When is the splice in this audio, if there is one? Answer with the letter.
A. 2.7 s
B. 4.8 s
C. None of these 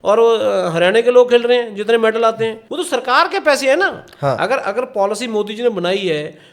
A